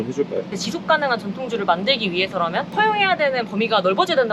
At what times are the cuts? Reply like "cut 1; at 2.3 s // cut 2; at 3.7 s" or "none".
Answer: none